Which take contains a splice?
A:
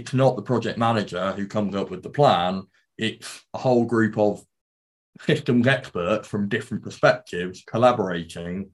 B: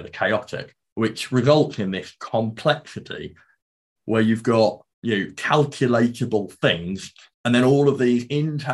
B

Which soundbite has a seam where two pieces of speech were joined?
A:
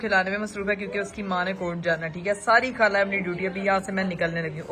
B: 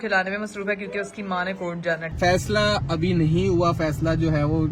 B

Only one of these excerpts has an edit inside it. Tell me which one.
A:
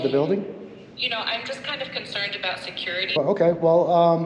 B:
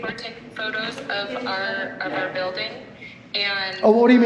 A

